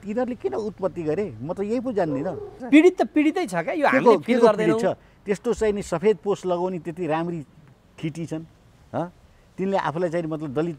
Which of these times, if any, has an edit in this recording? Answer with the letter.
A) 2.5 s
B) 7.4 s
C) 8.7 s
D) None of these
A